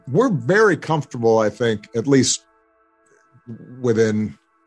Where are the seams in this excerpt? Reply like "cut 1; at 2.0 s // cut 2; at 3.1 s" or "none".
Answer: none